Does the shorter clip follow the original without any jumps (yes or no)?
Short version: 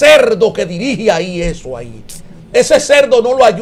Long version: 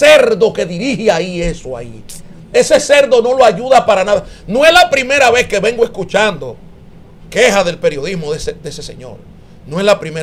yes